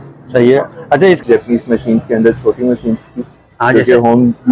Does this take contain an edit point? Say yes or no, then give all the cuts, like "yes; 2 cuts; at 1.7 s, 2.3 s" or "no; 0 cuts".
yes; 1 cut; at 1.2 s